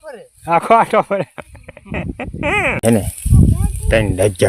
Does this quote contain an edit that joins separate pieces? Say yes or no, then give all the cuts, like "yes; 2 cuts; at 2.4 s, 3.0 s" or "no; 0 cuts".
yes; 1 cut; at 2.8 s